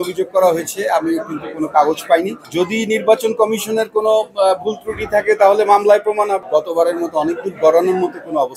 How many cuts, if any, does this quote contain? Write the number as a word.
two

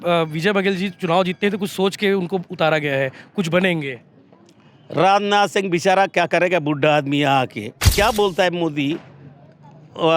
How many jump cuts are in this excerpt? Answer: one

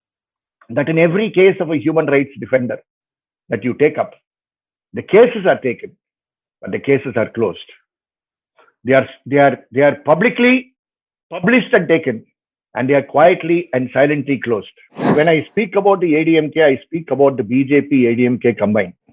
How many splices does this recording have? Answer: one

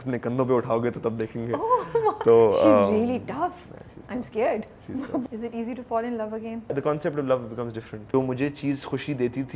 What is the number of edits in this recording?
three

